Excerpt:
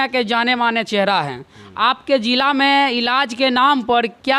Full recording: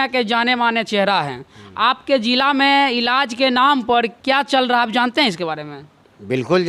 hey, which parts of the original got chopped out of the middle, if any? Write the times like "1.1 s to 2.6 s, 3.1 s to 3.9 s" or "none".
none

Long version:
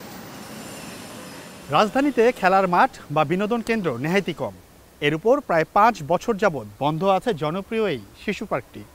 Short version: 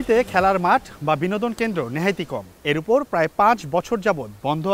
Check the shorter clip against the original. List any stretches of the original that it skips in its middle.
4.5 s to 4.8 s

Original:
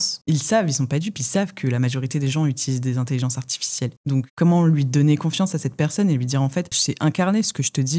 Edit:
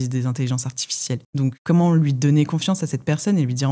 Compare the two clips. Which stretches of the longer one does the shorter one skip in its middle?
none

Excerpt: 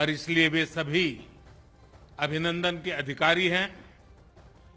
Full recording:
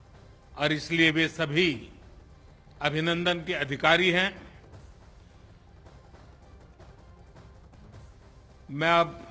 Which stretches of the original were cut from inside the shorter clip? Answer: 4.5 s to 6.3 s

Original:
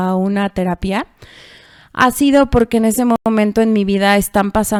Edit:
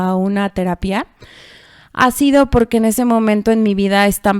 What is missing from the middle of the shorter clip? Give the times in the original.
3.2 s to 3.3 s

